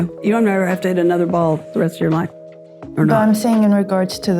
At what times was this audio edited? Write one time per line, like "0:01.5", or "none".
0:02.4